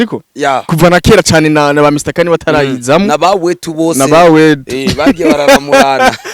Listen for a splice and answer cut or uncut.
uncut